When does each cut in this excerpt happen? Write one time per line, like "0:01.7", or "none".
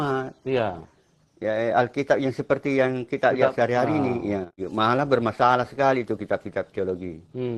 0:04.6